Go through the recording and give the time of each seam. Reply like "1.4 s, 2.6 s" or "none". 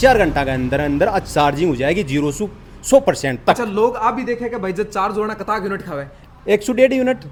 none